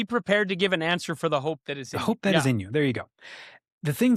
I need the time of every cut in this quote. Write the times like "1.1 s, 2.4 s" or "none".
none